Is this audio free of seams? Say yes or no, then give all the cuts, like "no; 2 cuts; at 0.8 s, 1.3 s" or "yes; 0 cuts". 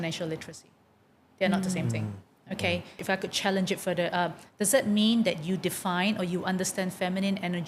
no; 1 cut; at 3.0 s